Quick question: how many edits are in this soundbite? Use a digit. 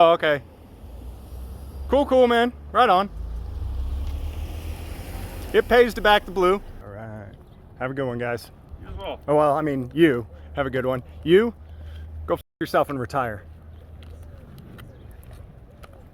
1